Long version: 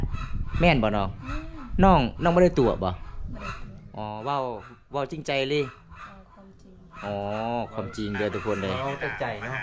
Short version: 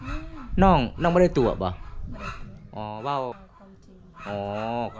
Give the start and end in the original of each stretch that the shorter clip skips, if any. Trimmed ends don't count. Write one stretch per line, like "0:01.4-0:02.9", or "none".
0:04.7-0:06.3